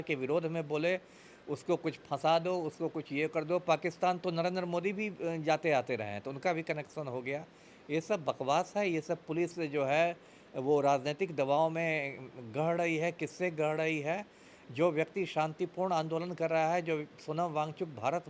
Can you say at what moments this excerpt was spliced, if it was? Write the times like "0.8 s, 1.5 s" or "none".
none